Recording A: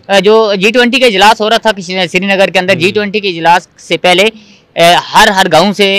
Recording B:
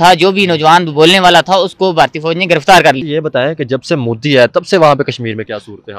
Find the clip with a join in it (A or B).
B